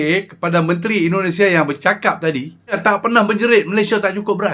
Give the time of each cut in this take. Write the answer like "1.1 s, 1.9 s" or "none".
2.8 s